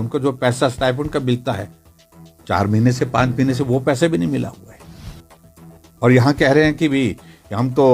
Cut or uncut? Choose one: uncut